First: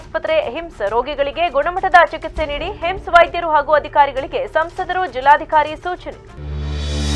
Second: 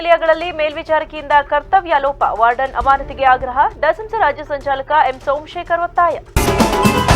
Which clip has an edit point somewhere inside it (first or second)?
second